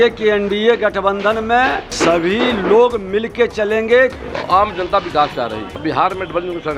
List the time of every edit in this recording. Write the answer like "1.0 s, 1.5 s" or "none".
1.9 s, 4.2 s, 5.7 s

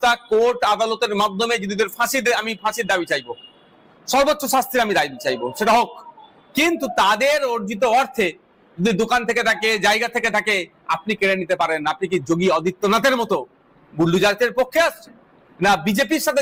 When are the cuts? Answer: none

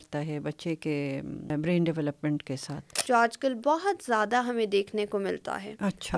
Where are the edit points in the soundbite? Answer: 1.5 s, 2.9 s

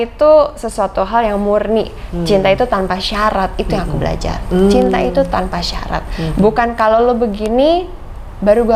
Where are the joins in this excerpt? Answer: none

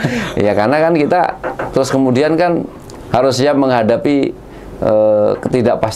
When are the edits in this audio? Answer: none

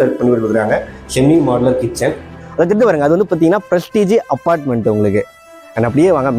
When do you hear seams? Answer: 2.4 s

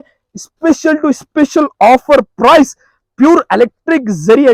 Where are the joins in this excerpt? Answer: none

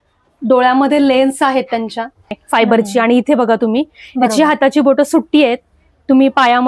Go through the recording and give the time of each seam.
2.3 s

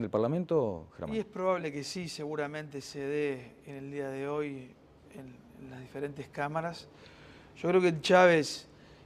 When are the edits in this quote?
2.3 s

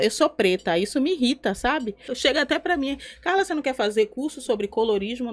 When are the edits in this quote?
2.1 s

